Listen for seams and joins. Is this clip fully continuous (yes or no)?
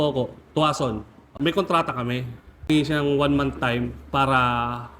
no